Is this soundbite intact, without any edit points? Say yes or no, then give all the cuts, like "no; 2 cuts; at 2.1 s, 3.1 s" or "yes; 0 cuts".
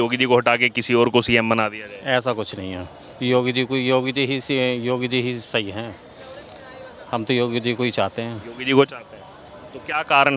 yes; 0 cuts